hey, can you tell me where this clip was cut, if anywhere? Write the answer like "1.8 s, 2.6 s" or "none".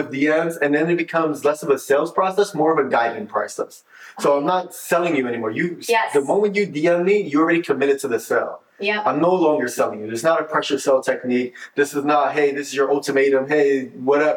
none